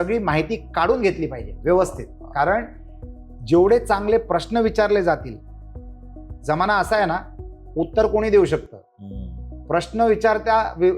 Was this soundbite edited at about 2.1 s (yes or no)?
no